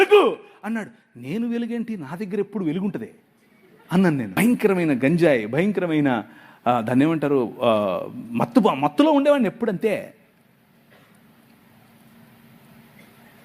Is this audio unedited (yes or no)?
no